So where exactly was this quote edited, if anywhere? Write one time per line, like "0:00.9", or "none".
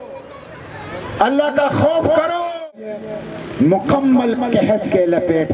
0:02.7